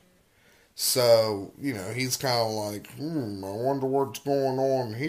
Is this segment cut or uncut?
uncut